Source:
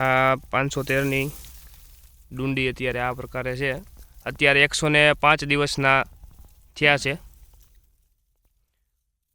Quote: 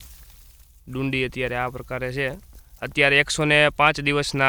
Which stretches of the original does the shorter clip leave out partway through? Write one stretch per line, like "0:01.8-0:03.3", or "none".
none